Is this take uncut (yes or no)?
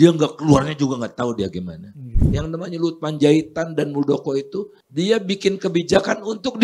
no